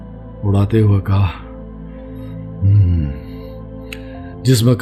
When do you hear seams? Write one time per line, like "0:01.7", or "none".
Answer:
none